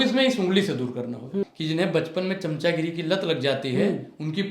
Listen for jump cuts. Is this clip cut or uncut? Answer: cut